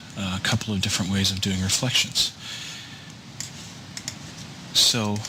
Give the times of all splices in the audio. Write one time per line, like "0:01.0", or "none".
none